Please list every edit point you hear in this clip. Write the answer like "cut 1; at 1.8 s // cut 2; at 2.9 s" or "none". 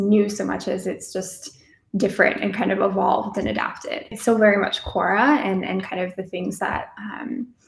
cut 1; at 4.1 s